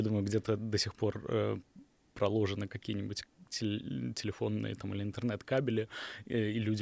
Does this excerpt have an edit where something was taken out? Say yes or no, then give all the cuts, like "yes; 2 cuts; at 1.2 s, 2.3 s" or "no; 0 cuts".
no; 0 cuts